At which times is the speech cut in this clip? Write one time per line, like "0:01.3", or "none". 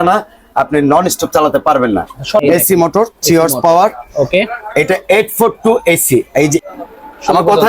0:02.4
0:06.6